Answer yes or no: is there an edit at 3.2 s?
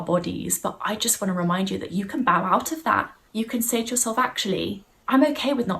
yes